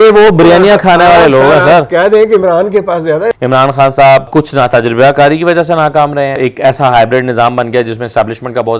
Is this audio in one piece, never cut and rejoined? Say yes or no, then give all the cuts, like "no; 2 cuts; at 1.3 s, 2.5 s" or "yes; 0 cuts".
no; 3 cuts; at 3.3 s, 4.3 s, 6.4 s